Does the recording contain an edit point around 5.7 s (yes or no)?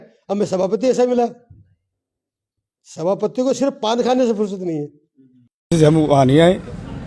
yes